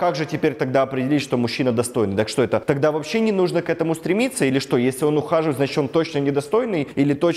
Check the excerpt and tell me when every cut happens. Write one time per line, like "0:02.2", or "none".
none